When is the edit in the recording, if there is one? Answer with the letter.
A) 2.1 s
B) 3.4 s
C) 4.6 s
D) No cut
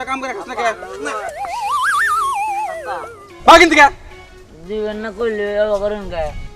B